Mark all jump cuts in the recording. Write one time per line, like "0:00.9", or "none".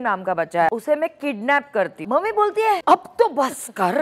0:00.7
0:02.0
0:02.8